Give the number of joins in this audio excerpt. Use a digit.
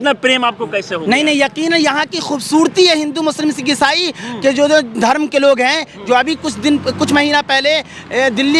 0